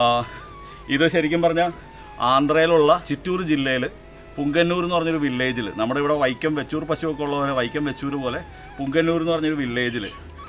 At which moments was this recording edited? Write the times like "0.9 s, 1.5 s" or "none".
none

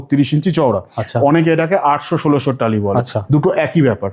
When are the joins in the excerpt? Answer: none

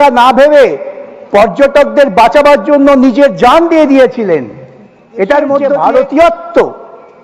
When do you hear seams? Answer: 5.7 s

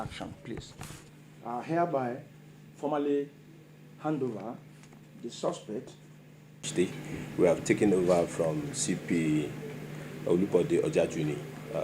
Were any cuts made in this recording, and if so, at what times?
6.6 s

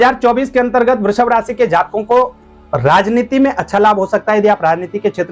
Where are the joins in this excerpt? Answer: none

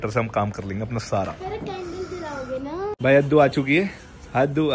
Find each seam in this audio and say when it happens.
2.9 s

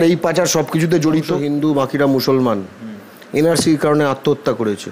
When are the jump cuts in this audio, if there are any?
1.4 s

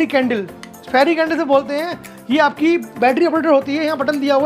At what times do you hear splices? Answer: none

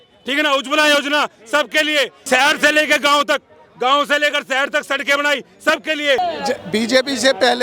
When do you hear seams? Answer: 2.2 s, 6.2 s

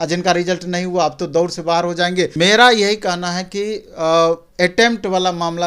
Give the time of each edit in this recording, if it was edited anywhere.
2.3 s

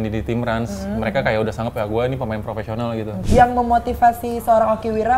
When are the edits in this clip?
3.2 s

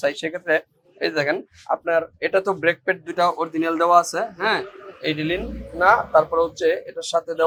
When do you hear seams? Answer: none

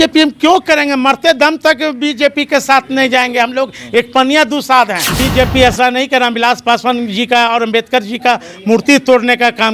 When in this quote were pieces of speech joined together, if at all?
5.2 s

